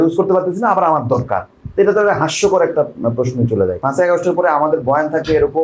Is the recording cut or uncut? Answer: cut